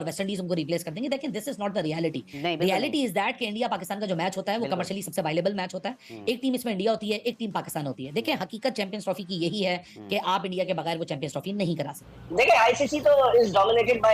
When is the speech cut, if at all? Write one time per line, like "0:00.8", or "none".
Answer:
0:12.1

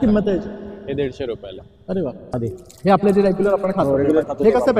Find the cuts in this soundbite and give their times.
0:02.3

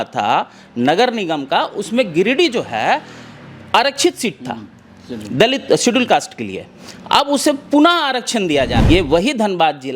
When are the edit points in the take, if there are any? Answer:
0:08.8

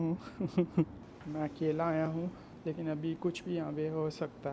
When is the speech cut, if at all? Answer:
0:01.1
0:02.5

